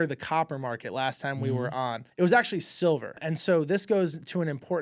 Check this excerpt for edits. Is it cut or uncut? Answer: cut